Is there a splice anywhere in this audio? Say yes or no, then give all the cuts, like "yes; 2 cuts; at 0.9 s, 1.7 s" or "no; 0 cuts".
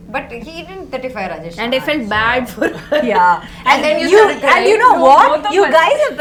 no; 0 cuts